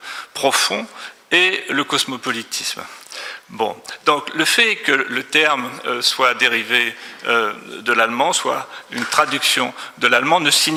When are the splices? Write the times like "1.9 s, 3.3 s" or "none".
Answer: none